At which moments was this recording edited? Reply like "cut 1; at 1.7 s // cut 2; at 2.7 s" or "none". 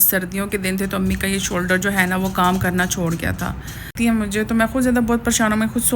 cut 1; at 3.9 s